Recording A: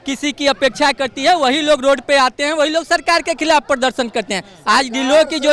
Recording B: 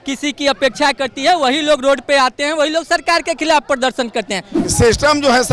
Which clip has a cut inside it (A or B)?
B